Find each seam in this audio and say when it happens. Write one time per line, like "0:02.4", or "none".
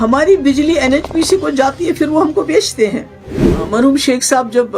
0:03.5